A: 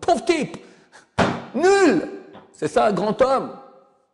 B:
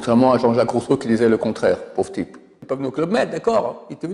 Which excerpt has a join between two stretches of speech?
B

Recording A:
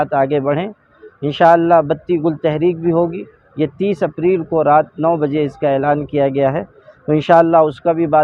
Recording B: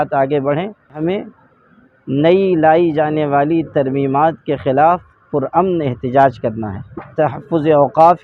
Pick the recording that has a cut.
B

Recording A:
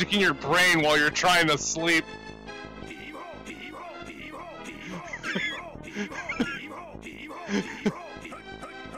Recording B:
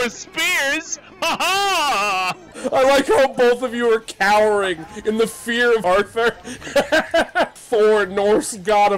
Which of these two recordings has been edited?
B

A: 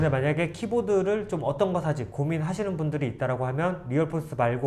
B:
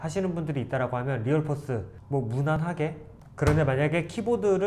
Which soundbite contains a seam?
B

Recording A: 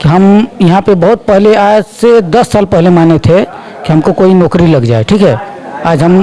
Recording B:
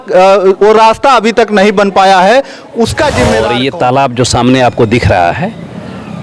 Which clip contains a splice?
B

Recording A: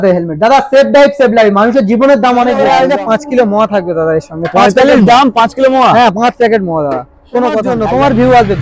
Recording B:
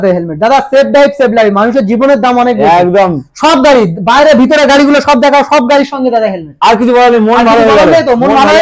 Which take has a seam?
A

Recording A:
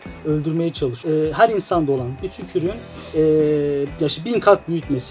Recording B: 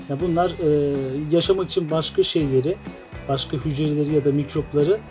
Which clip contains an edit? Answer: A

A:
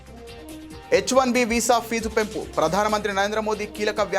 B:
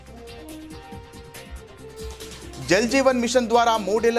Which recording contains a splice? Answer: A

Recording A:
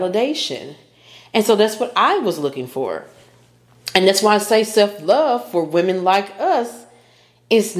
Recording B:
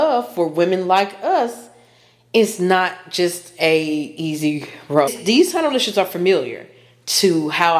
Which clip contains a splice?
B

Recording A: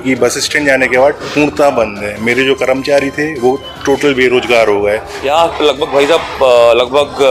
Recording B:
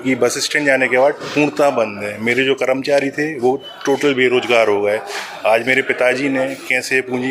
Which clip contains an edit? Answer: A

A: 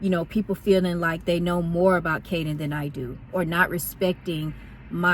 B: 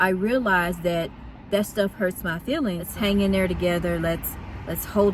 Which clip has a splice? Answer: B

